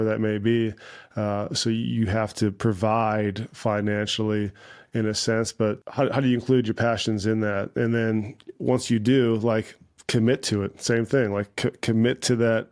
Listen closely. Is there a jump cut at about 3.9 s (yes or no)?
no